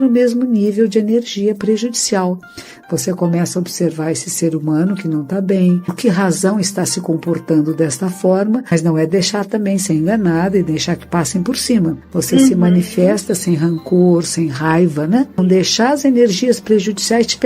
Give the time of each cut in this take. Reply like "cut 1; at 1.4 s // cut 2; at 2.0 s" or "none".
cut 1; at 5.9 s // cut 2; at 8.7 s // cut 3; at 12.0 s // cut 4; at 15.4 s